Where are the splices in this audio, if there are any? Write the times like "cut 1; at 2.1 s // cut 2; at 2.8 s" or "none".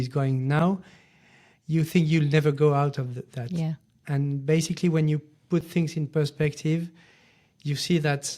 none